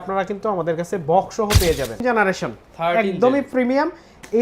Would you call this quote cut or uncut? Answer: cut